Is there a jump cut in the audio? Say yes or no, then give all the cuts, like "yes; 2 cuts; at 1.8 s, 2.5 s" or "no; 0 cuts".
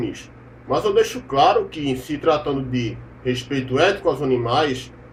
no; 0 cuts